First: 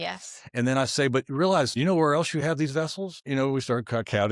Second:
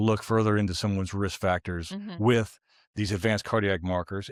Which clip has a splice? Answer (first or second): first